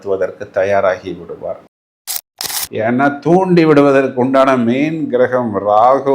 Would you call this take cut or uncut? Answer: cut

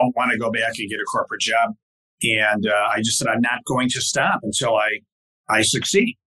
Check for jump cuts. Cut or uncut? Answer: uncut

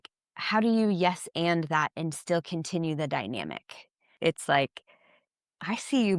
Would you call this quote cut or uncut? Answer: cut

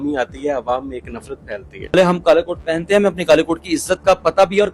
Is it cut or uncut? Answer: cut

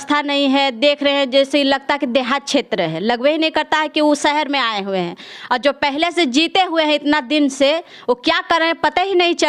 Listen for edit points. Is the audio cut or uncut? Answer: uncut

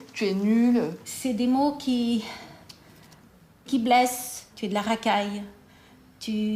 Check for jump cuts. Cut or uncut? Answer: cut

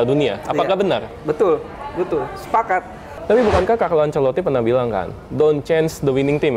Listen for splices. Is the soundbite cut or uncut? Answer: cut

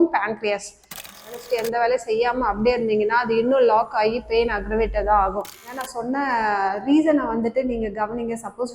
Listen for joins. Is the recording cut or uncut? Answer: cut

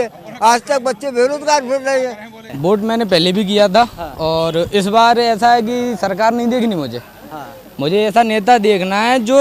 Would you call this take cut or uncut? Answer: cut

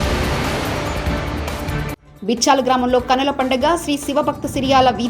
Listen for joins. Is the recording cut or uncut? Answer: cut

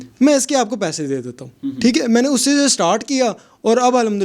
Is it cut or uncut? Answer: uncut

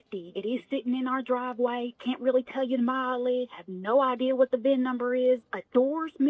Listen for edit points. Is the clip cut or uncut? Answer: uncut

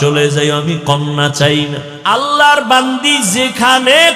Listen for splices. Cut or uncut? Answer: cut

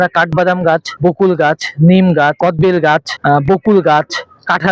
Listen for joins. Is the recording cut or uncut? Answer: cut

